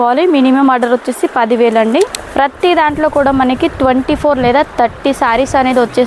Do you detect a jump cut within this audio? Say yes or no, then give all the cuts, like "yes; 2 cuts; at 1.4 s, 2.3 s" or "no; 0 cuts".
yes; 1 cut; at 2.2 s